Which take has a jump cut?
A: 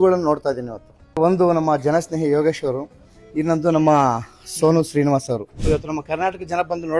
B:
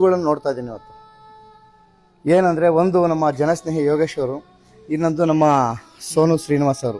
A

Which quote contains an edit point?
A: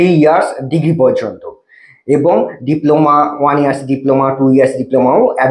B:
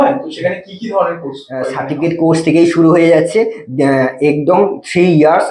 B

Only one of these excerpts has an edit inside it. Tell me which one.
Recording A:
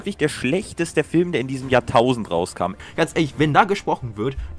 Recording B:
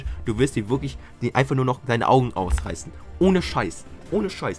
A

